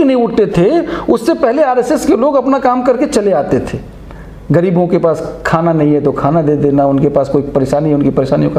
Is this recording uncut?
yes; 0 cuts

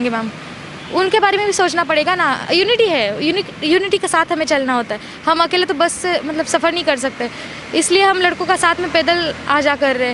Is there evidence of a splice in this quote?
no; 0 cuts

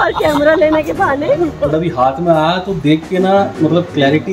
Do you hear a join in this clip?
yes; 1 cut; at 1.6 s

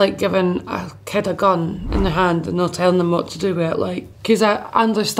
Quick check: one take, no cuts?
no; 1 cut; at 4.1 s

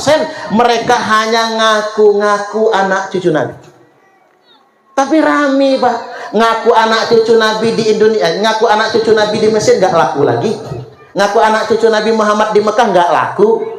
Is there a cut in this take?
no; 0 cuts

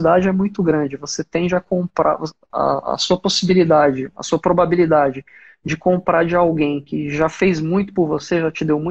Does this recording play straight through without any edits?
yes; 0 cuts

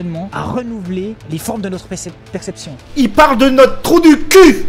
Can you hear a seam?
yes; 1 cut; at 2.8 s

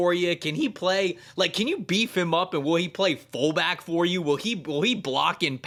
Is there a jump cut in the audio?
no; 0 cuts

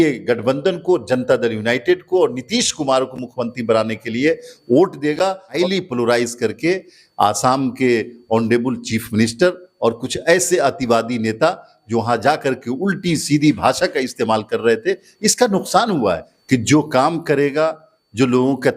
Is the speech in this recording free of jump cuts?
no; 2 cuts; at 5.6 s, 16.3 s

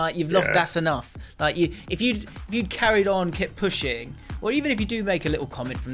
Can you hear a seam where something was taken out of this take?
no; 0 cuts

